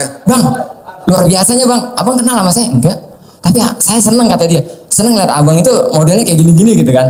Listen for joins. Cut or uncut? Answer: uncut